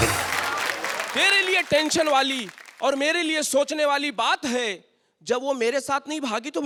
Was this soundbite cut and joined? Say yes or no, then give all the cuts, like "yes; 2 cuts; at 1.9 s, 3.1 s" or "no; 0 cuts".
no; 0 cuts